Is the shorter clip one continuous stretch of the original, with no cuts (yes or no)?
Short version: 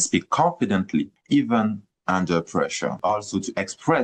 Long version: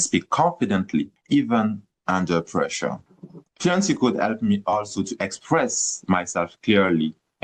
no